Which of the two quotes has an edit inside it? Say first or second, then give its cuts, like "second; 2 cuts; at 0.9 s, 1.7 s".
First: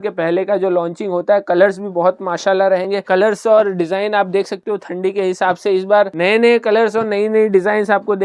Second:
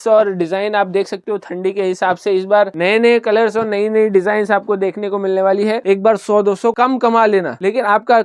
second; 1 cut; at 5.8 s